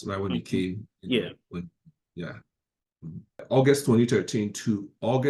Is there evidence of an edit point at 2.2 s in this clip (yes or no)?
no